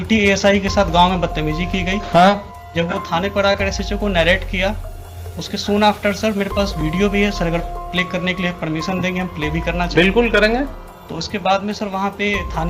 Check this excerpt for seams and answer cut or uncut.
uncut